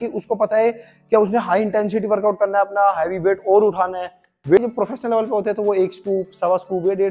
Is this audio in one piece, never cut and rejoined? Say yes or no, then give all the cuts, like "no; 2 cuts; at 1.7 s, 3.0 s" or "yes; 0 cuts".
yes; 0 cuts